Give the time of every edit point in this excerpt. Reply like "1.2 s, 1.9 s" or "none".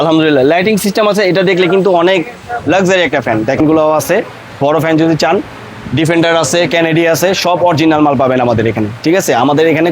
3.6 s